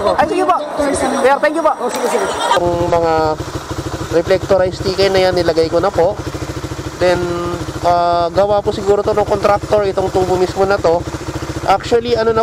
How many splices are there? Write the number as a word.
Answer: two